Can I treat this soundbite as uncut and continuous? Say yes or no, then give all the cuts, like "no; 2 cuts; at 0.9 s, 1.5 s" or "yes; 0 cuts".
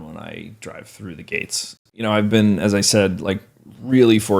no; 1 cut; at 1.8 s